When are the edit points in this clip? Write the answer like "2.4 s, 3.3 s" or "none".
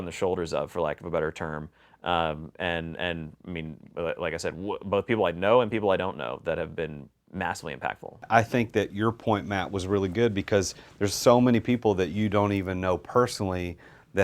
8.2 s